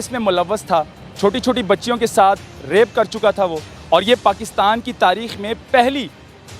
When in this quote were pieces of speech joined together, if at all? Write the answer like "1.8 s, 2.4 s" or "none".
1.0 s, 3.7 s